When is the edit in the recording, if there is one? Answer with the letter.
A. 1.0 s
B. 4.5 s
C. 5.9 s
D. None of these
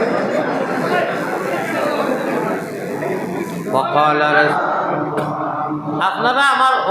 B